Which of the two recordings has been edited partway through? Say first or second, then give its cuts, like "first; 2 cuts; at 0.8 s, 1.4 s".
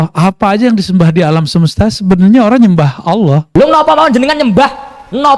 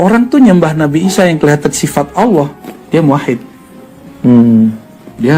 first; 1 cut; at 3.4 s